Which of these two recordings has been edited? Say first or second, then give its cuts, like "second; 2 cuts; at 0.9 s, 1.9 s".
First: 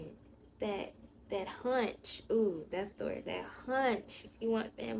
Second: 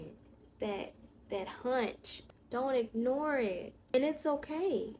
second; 2 cuts; at 2.1 s, 3.8 s